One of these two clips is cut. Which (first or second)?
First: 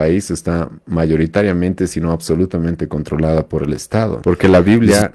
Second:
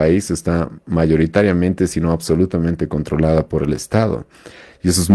first